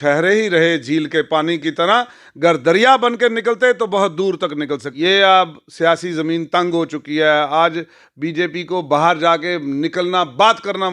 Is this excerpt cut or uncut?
cut